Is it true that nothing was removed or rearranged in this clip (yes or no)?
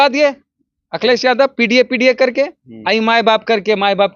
yes